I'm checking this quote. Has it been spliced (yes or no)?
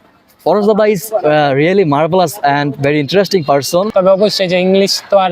yes